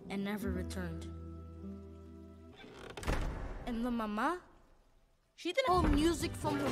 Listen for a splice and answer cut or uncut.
uncut